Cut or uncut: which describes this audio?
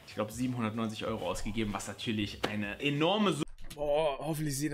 uncut